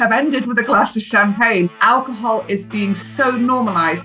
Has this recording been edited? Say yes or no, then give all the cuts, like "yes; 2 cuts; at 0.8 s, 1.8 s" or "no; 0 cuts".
yes; 1 cut; at 1.7 s